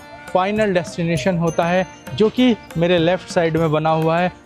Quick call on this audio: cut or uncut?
uncut